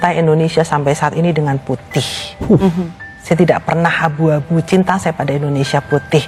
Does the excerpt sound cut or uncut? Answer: uncut